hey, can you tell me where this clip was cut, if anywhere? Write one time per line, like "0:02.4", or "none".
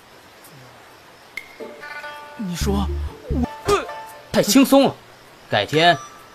none

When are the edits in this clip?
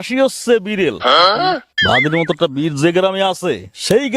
0:01.7

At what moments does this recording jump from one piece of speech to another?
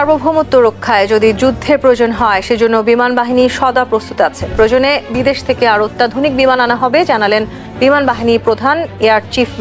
none

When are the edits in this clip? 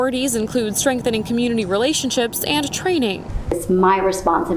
0:03.3

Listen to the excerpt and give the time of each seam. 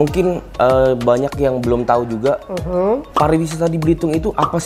0:03.1

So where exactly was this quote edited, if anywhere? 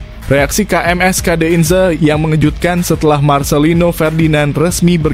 none

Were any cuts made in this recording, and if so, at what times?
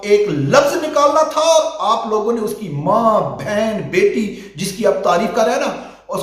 none

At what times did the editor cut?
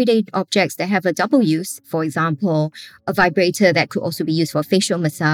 0:01.8

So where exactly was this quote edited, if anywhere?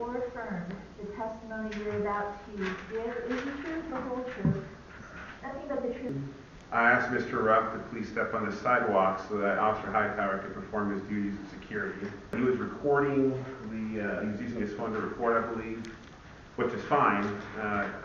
0:06.1
0:12.3

